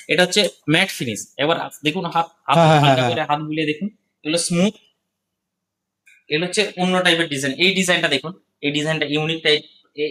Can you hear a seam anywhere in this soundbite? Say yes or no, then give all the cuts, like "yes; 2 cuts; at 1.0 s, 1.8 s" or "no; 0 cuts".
no; 0 cuts